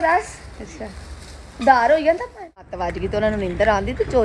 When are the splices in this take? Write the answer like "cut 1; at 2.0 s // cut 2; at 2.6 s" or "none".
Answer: cut 1; at 2.8 s